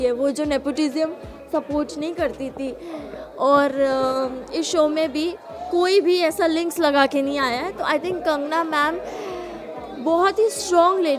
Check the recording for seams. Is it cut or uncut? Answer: uncut